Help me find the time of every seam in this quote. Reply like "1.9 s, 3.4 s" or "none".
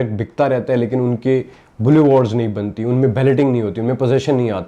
none